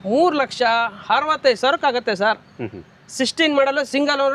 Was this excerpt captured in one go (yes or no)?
yes